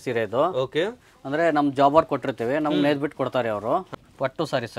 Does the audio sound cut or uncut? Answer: cut